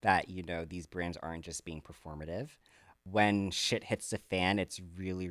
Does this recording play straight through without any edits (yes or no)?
no